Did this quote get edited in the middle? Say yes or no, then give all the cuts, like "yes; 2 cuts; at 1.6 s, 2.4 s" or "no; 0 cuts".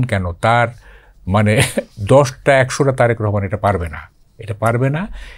no; 0 cuts